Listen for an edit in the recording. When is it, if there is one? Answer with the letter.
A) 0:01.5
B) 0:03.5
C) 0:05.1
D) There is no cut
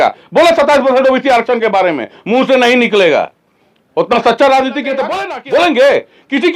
C